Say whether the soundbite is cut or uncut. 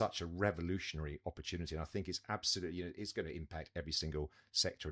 uncut